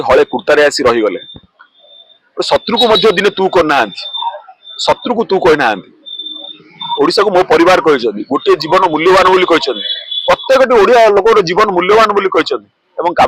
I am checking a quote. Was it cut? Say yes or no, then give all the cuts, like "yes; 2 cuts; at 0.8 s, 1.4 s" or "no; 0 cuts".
no; 0 cuts